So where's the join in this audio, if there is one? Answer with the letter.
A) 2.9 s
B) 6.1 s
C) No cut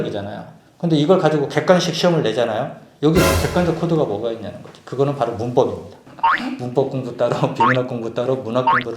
B